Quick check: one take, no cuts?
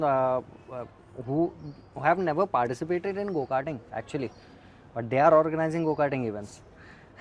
yes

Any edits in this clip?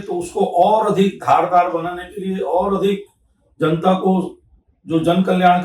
no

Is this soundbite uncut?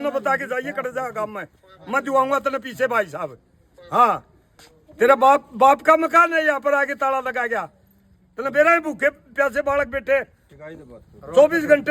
yes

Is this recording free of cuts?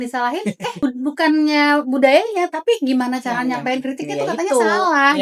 yes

